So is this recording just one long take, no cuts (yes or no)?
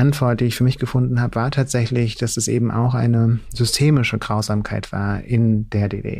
yes